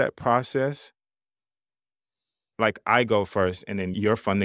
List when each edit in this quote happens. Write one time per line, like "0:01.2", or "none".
none